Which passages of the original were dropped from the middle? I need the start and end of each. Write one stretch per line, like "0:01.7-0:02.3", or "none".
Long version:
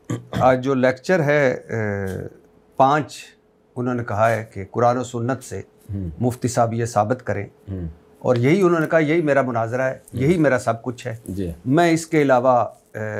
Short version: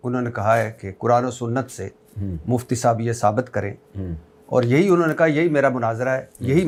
none